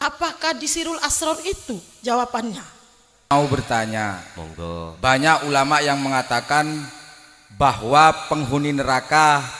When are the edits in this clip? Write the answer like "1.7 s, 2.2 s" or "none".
3.3 s